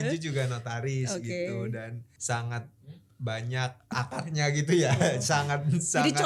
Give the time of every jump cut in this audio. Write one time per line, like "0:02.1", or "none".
0:02.1
0:03.9

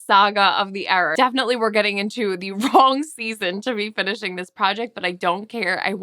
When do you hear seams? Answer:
0:01.1

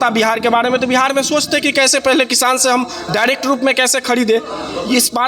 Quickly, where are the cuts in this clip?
none

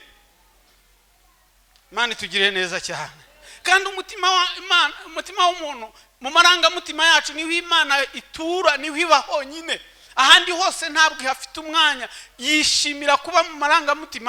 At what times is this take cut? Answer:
none

